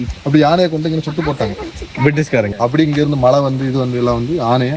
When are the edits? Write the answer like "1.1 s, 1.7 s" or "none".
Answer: 2.5 s